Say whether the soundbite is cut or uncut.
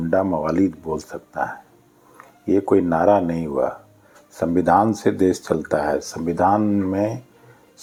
uncut